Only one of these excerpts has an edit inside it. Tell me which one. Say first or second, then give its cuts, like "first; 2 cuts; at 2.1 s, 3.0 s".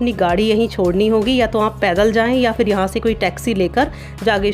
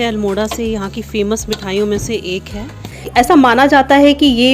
second; 1 cut; at 3.0 s